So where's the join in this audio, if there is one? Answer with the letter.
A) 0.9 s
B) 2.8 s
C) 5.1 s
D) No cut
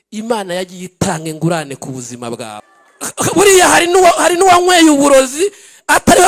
B